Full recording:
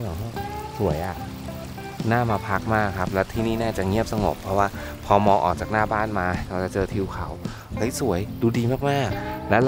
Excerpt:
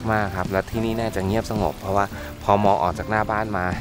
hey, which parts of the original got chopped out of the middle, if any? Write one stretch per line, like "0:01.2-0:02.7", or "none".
none